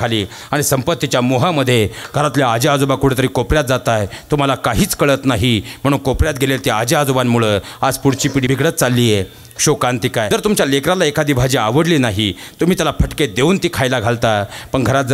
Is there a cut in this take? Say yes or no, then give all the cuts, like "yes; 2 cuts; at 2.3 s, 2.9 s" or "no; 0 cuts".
yes; 2 cuts; at 8.5 s, 10.3 s